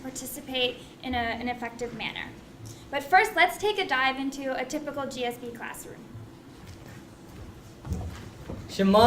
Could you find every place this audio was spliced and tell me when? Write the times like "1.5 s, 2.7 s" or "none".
1.0 s